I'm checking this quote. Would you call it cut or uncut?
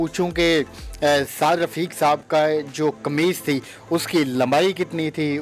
uncut